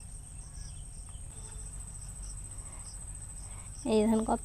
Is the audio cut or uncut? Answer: cut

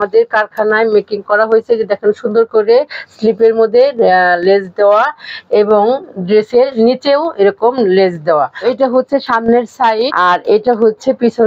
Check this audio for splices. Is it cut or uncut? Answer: cut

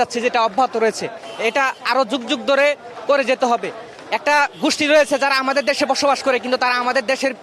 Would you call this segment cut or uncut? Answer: uncut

